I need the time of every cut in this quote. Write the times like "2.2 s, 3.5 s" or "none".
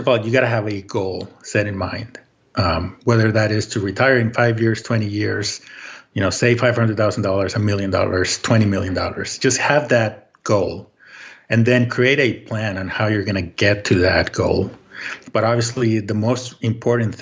none

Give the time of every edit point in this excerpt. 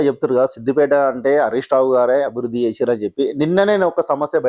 none

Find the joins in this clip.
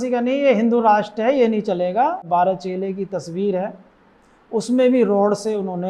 2.2 s

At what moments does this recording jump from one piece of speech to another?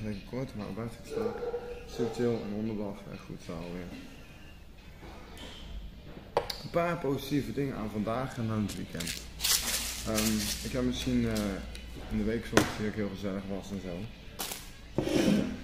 none

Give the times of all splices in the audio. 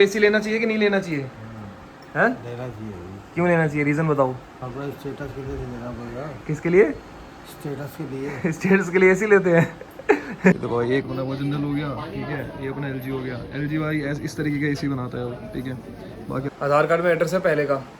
4.5 s, 10.5 s, 16.5 s

